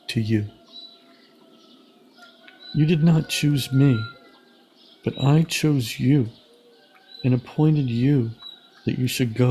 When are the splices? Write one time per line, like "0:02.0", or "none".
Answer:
none